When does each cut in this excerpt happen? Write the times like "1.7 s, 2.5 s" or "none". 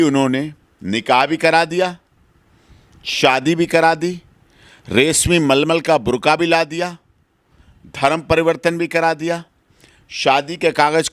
none